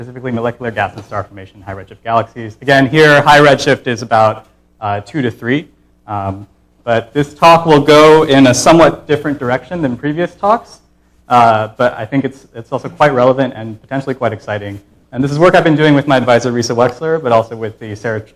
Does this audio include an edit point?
no; 0 cuts

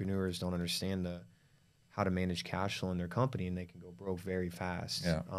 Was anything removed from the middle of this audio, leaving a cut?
no; 0 cuts

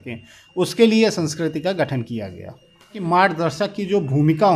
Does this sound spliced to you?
yes; 1 cut; at 3.0 s

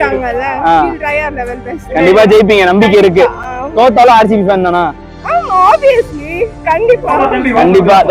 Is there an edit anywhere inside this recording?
no; 0 cuts

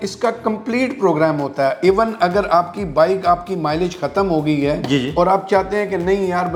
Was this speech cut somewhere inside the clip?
no; 0 cuts

